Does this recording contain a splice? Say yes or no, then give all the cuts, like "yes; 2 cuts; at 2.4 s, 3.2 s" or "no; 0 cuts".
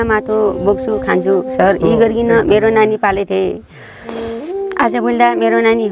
no; 0 cuts